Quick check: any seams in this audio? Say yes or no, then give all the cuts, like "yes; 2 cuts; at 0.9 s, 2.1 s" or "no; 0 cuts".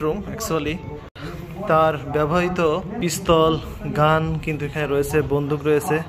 yes; 2 cuts; at 1.3 s, 2.9 s